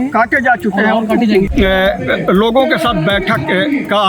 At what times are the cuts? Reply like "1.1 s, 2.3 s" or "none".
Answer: 1.5 s